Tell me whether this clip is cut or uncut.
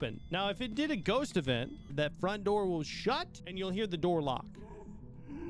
cut